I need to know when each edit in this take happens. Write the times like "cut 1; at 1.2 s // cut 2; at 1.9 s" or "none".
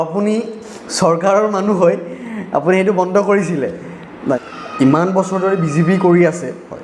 cut 1; at 4.4 s

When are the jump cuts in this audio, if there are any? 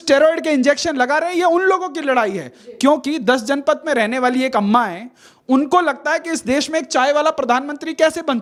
none

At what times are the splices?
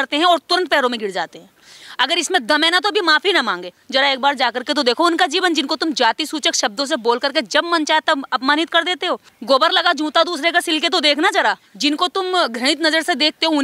cut 1; at 3.8 s // cut 2; at 9.3 s // cut 3; at 11.7 s

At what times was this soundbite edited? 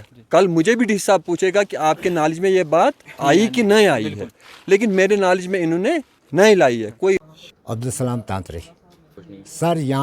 cut 1; at 7.2 s

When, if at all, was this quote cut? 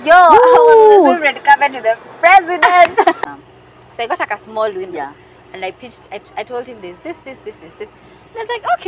cut 1; at 3.2 s

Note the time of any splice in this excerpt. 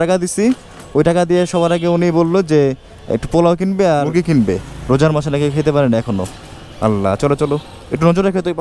cut 1; at 4.1 s

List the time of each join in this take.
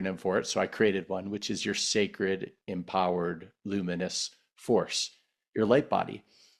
none

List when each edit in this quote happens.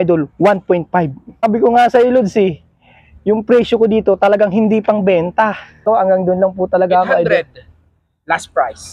cut 1; at 1.4 s // cut 2; at 5.8 s

